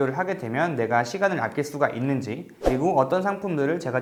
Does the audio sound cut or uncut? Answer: uncut